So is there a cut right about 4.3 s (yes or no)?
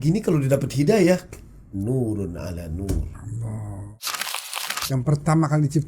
yes